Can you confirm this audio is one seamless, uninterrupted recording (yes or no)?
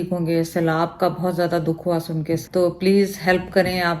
no